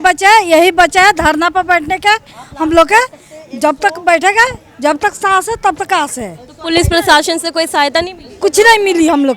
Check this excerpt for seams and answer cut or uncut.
uncut